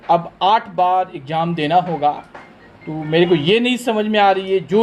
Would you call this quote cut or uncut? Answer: uncut